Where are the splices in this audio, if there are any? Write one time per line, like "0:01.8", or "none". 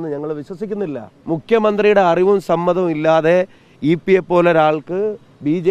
0:01.1